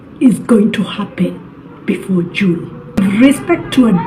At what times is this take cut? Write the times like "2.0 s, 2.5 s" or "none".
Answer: 3.0 s